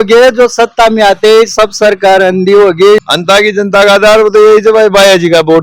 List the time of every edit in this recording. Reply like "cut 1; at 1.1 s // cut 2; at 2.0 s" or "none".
cut 1; at 3.0 s